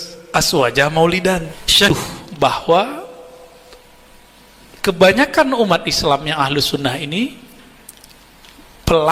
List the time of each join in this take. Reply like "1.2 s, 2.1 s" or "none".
1.8 s